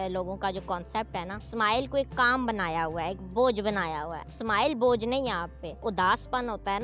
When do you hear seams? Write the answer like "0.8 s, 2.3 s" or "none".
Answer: 1.4 s, 4.3 s, 5.8 s